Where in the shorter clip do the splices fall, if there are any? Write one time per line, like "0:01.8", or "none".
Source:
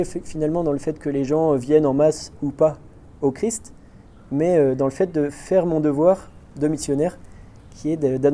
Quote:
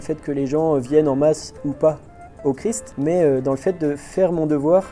0:02.9